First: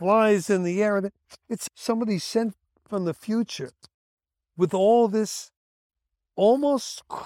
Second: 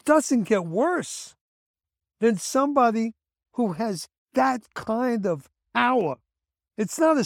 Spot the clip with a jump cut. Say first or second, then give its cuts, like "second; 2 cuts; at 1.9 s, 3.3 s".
first; 1 cut; at 1.5 s